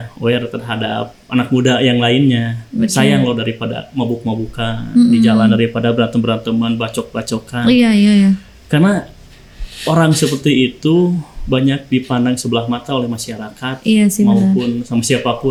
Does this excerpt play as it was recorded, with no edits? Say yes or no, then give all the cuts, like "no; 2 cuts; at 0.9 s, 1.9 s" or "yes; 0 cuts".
yes; 0 cuts